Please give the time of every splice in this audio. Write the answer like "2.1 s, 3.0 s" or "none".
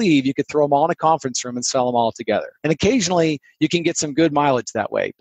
2.5 s